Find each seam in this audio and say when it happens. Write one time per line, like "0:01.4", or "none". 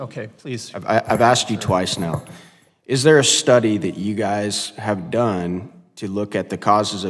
none